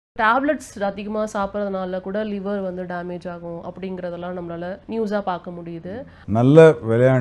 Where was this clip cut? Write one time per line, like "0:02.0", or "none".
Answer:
0:04.8
0:06.2